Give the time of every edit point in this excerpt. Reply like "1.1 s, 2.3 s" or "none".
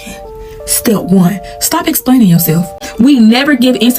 2.8 s